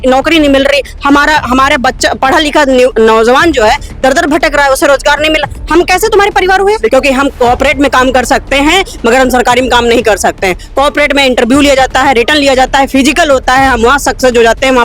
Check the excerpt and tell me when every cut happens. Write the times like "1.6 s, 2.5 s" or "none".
6.9 s